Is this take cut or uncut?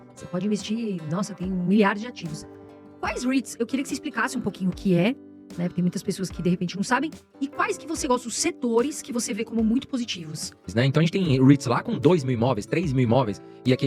cut